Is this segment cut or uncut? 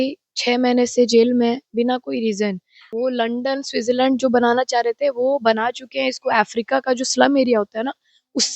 cut